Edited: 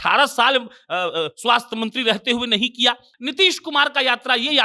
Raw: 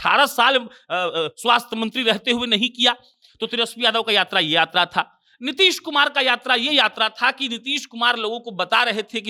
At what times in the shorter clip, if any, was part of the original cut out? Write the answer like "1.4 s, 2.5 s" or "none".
3.1 s